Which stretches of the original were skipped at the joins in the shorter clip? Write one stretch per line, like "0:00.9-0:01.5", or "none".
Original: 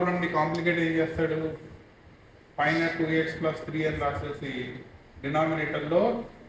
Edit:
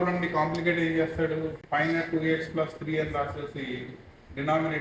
0:01.6-0:02.5